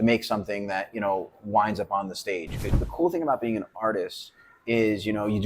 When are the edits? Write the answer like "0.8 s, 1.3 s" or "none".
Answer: 2.8 s